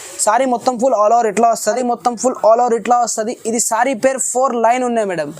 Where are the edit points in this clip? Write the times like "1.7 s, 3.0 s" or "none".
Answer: 1.8 s